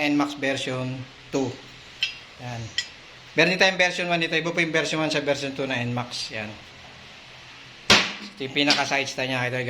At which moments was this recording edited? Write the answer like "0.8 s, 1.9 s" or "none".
none